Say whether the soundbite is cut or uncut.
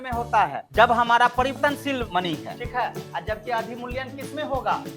cut